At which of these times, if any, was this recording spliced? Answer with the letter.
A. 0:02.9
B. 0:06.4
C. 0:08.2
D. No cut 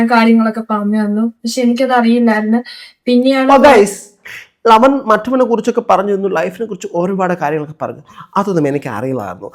D